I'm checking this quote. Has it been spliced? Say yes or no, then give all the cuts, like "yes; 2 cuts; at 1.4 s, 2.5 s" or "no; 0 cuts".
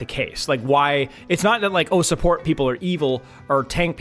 no; 0 cuts